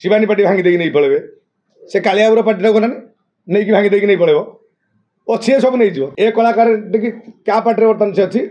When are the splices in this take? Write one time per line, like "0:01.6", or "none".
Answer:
0:06.1